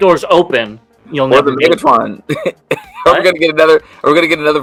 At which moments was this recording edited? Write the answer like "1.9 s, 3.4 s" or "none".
none